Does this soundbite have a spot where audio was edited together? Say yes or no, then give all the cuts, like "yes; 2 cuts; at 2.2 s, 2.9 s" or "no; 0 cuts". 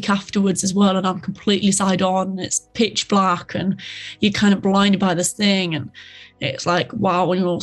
no; 0 cuts